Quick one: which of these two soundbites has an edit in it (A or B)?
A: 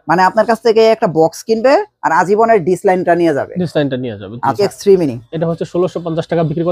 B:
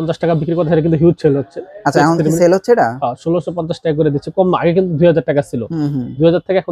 A